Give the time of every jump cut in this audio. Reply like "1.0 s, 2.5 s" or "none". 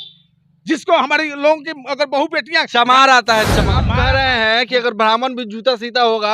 3.9 s

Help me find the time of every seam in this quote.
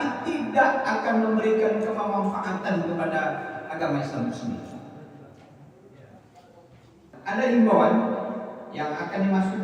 7.0 s

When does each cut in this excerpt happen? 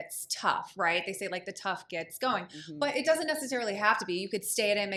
none

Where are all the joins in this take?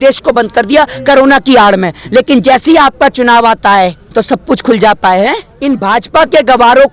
4.0 s, 5.5 s

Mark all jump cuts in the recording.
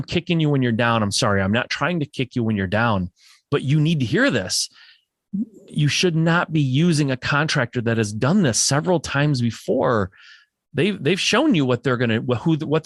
none

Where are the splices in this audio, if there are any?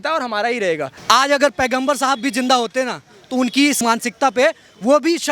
0.9 s, 3.8 s

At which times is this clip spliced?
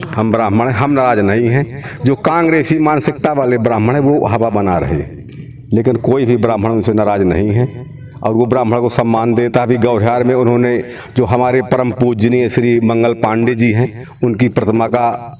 none

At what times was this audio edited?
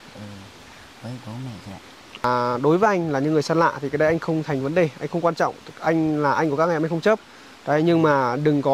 2.2 s

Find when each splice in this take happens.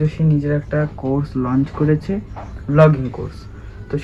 none

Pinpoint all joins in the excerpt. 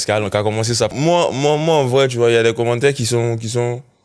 0.9 s

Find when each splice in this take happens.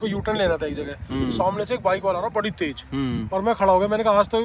none

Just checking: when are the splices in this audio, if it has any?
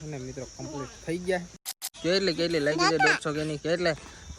1.8 s

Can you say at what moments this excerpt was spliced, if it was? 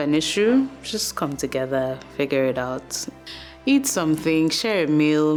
none

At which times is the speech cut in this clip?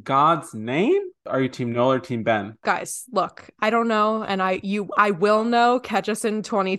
1.2 s

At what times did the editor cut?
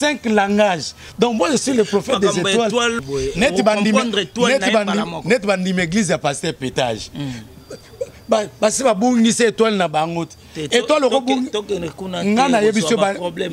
3.0 s

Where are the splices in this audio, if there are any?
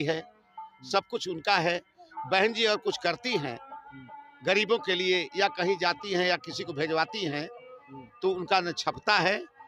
none

